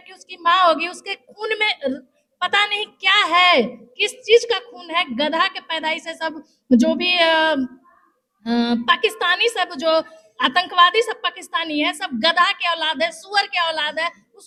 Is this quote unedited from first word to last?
yes; 0 cuts

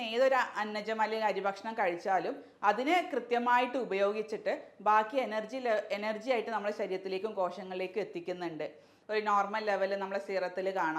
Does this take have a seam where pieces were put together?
yes; 1 cut; at 8.9 s

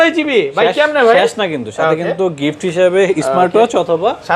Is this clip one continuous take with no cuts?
yes; 0 cuts

